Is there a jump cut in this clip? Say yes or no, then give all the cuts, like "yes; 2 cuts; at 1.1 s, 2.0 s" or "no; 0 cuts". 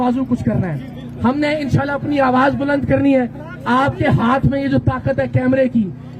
no; 0 cuts